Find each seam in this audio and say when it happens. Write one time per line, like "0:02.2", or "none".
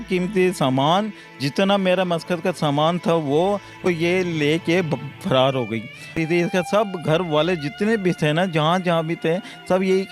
0:03.9
0:06.1